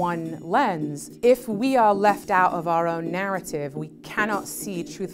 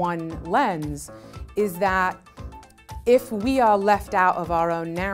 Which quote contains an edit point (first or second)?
first